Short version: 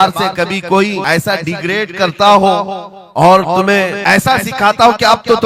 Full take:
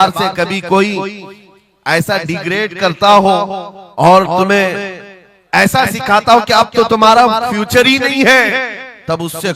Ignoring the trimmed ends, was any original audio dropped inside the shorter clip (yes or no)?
yes